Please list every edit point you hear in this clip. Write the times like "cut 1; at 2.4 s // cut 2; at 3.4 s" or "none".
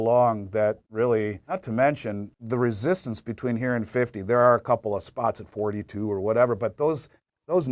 cut 1; at 1.5 s // cut 2; at 2.3 s